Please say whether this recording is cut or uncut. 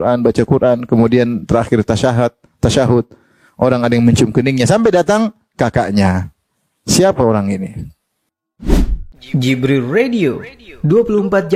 cut